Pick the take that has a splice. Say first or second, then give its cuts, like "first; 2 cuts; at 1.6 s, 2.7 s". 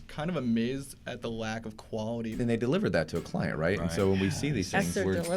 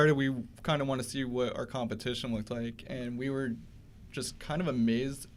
first; 1 cut; at 2.4 s